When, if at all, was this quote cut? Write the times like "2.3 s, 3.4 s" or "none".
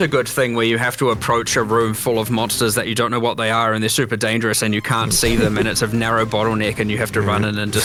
none